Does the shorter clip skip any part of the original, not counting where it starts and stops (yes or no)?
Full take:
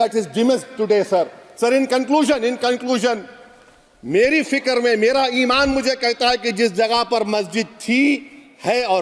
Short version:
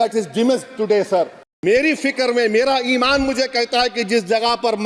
yes